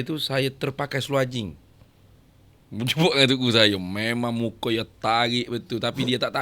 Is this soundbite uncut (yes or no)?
yes